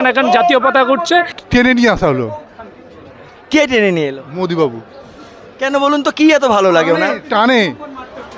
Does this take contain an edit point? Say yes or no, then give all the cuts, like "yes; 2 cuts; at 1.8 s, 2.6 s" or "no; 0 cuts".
yes; 1 cut; at 1.3 s